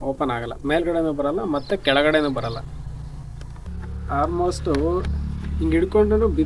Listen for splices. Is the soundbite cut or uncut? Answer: cut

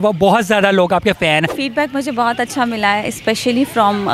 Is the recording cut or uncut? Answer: cut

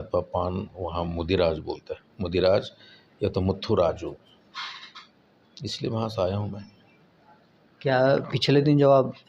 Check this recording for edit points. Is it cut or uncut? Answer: uncut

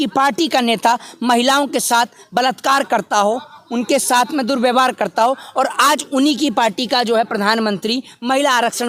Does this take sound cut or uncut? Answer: uncut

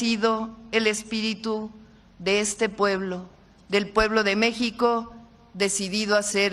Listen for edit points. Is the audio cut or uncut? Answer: uncut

